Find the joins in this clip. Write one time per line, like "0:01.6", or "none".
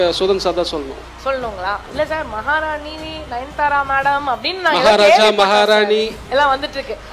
0:06.2